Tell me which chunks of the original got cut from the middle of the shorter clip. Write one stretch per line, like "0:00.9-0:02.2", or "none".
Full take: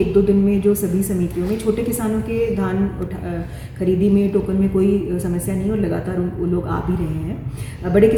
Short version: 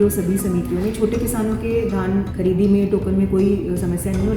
0:03.0-0:03.7